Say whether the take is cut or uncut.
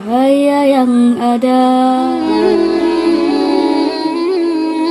cut